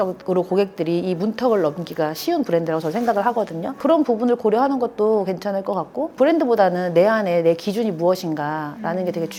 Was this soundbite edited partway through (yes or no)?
no